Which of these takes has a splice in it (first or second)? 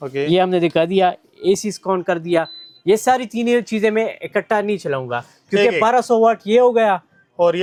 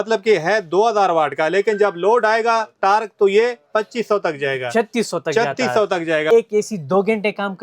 second